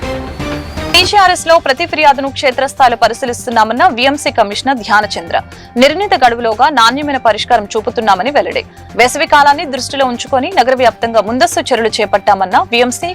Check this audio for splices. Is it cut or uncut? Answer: cut